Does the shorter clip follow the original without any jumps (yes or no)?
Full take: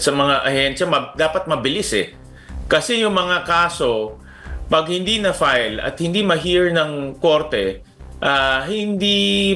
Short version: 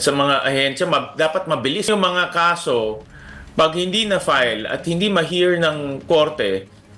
no